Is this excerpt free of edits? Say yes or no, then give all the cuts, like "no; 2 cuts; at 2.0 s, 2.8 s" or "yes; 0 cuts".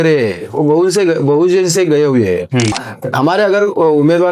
no; 1 cut; at 2.9 s